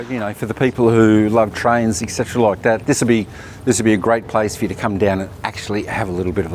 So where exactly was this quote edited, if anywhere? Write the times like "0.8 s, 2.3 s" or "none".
none